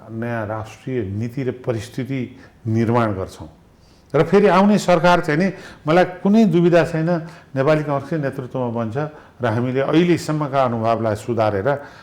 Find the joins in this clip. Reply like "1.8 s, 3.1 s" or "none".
none